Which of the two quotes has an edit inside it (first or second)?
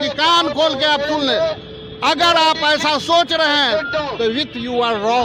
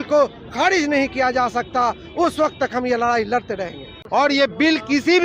second